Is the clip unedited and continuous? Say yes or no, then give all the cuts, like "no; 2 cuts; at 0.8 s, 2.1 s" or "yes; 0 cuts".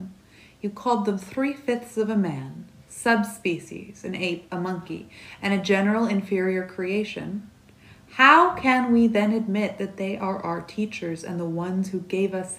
yes; 0 cuts